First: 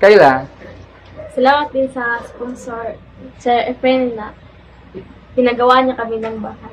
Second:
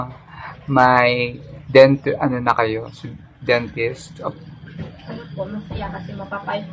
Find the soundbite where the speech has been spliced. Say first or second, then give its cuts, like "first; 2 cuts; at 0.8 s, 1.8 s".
first; 1 cut; at 3.5 s